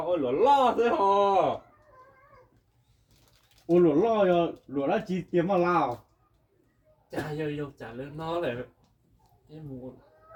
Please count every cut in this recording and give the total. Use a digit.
0